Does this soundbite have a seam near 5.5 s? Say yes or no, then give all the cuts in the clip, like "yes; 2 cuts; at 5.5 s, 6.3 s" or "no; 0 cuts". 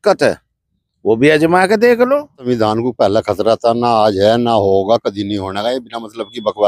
no; 1 cut; at 2.4 s